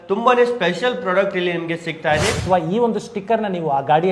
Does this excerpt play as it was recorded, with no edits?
no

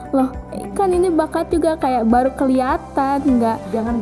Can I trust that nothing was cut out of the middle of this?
yes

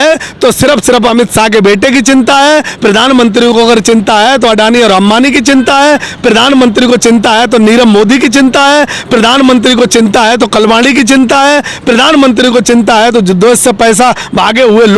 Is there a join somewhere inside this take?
no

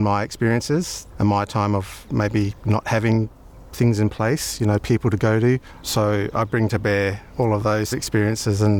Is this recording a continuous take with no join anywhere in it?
no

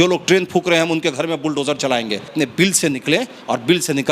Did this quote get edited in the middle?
yes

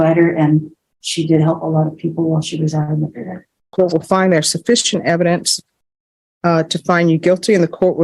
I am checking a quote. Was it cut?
yes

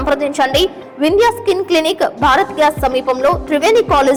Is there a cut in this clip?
no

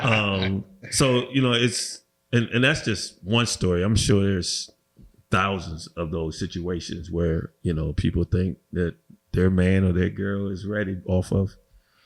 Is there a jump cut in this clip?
no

